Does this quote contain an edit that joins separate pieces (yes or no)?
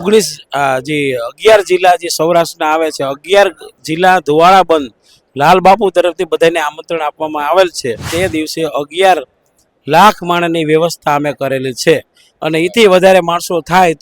yes